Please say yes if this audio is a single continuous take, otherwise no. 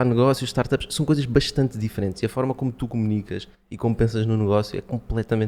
yes